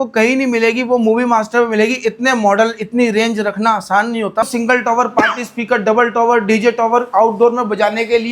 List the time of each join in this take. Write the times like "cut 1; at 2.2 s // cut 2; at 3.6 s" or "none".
cut 1; at 4.5 s